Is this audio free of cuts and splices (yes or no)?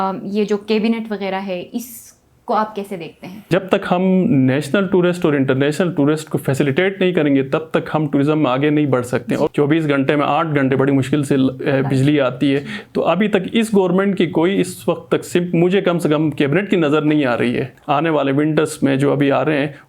no